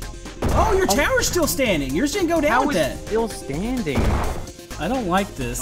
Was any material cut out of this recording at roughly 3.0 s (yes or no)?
no